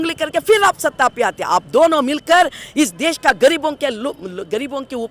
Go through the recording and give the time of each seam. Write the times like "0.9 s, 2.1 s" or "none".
none